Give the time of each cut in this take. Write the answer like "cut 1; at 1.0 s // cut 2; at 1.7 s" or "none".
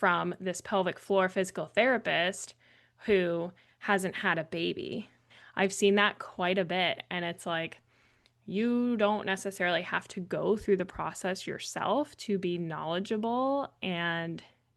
cut 1; at 5.4 s